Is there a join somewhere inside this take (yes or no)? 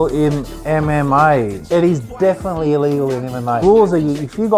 yes